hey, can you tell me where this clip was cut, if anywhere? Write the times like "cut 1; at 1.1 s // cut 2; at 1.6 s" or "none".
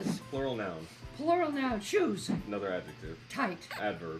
none